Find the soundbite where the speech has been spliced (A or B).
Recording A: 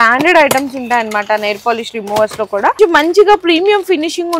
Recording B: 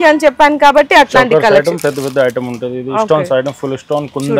A